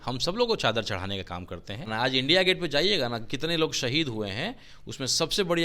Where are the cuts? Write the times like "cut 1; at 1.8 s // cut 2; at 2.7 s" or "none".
cut 1; at 1.9 s